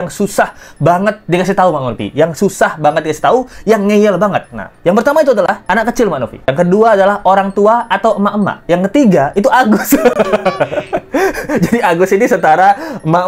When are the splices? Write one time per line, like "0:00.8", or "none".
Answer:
none